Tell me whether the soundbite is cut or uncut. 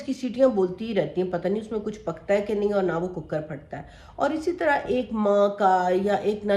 uncut